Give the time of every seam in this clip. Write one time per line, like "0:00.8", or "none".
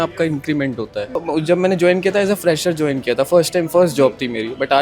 0:01.1

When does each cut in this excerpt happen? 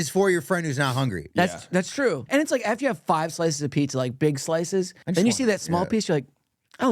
0:02.2
0:05.0

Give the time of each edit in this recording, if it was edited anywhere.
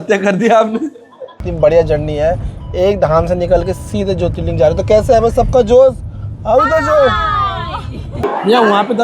0:01.4
0:08.1

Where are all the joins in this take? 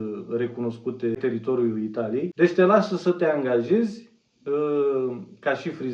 0:01.2
0:02.3

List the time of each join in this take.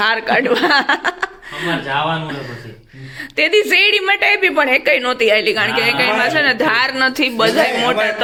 none

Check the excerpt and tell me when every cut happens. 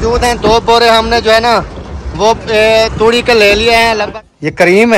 0:04.1

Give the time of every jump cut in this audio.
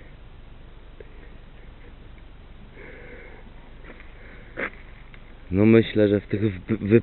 0:00.9

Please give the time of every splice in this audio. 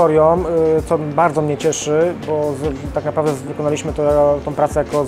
none

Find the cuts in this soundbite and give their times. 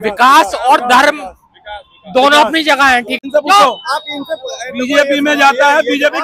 0:03.2

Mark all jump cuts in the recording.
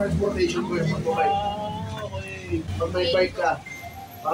0:02.7

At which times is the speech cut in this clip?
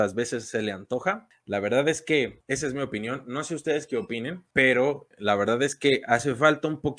0:01.3
0:02.4
0:04.4
0:05.1

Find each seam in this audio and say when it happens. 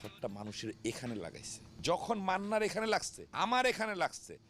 0:01.6
0:03.2

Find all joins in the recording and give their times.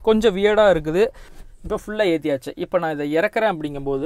0:01.3

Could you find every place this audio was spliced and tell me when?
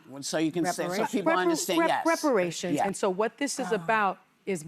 0:02.9

